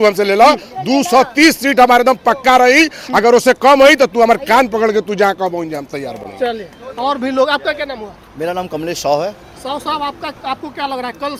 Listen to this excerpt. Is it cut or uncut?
uncut